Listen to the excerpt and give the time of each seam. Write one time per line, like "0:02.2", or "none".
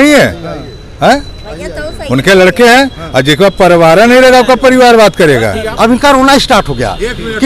0:05.7